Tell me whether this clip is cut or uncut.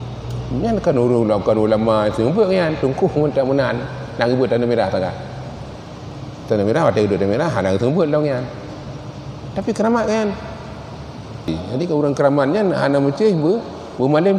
cut